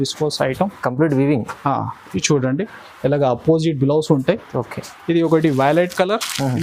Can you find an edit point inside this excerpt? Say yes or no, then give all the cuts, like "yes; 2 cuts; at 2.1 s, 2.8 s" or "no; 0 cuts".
no; 0 cuts